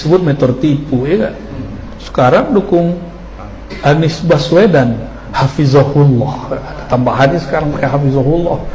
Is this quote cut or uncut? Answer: uncut